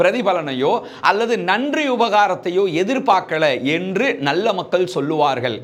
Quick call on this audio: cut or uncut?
uncut